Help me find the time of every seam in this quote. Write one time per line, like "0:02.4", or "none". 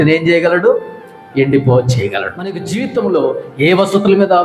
0:02.6